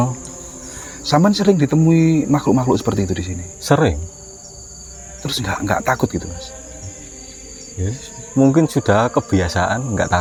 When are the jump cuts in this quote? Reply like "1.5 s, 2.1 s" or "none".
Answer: none